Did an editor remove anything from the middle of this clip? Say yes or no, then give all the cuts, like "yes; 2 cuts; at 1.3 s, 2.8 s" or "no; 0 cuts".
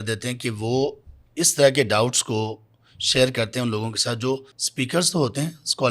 yes; 1 cut; at 4.6 s